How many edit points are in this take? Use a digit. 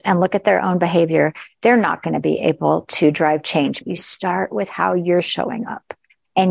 1